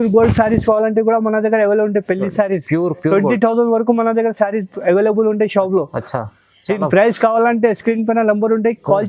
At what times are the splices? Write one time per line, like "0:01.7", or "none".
none